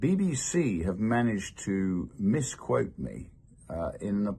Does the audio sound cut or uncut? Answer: uncut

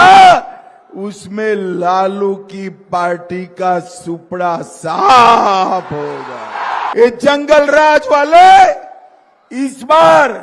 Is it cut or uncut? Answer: cut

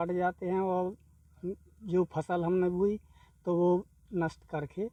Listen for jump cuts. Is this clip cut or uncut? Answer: uncut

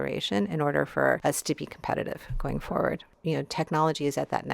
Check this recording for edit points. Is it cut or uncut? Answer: cut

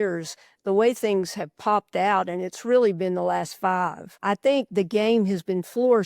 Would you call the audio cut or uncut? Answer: cut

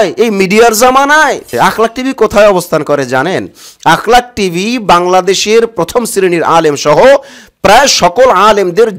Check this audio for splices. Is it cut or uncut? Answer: cut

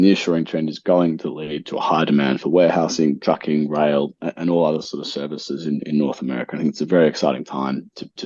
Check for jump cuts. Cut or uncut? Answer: uncut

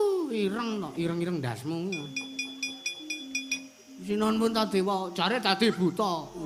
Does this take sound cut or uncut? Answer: uncut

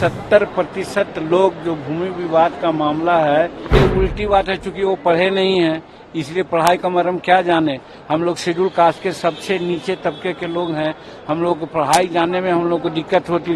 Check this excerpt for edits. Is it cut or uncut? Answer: cut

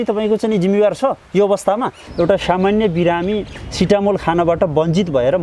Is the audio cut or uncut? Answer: cut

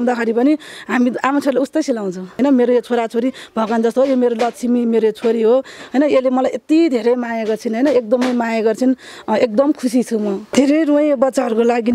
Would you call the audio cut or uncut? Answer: cut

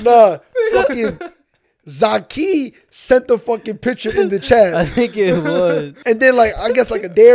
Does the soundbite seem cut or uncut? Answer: cut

